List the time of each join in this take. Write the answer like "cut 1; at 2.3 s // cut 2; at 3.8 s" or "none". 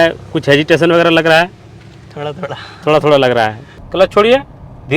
cut 1; at 3.6 s